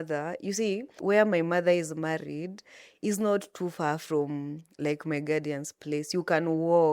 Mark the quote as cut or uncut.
cut